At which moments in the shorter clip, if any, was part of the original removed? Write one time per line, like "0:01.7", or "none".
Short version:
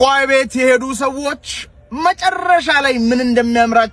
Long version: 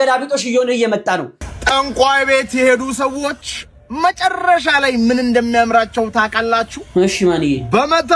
none